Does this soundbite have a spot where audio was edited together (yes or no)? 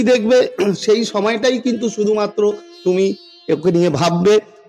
no